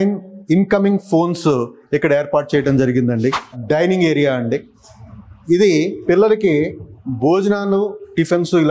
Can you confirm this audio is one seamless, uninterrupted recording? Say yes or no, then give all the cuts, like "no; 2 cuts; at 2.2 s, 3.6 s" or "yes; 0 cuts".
no; 1 cut; at 3.5 s